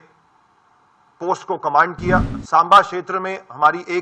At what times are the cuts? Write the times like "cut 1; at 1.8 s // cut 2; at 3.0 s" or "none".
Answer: cut 1; at 2.3 s